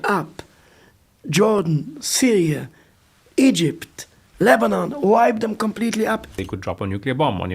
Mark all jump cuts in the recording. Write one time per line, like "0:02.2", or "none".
0:06.2